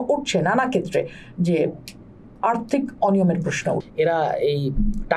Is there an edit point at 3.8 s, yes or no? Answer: yes